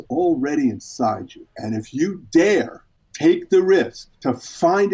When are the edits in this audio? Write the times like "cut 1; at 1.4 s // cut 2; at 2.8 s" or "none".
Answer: cut 1; at 4.0 s